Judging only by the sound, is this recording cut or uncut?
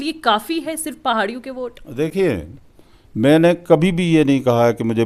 uncut